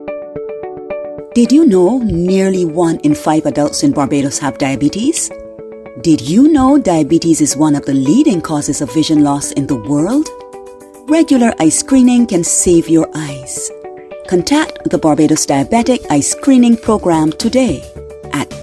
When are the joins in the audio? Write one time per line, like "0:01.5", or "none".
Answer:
0:01.2